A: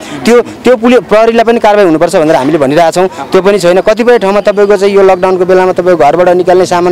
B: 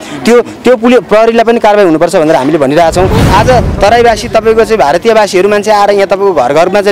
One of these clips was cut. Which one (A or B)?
B